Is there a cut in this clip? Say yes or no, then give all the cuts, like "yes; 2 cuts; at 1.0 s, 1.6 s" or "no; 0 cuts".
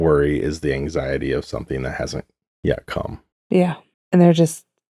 no; 0 cuts